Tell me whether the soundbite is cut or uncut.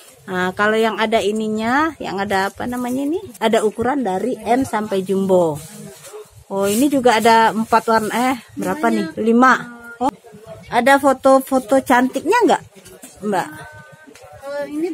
cut